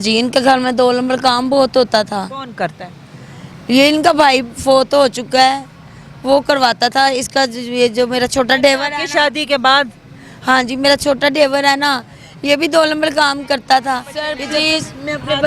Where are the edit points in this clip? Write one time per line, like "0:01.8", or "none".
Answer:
0:14.4